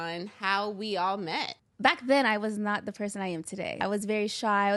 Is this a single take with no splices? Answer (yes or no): no